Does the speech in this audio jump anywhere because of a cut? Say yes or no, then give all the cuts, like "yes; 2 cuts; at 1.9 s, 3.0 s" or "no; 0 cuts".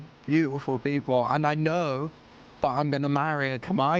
no; 0 cuts